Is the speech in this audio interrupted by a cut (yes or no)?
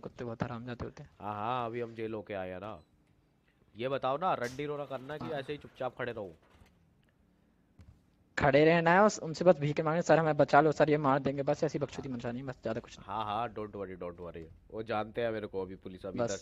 no